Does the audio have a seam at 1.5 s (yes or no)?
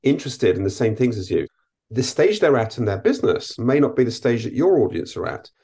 yes